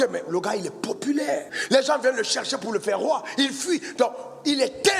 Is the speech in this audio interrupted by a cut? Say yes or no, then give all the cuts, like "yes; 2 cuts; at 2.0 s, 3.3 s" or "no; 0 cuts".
yes; 1 cut; at 1.5 s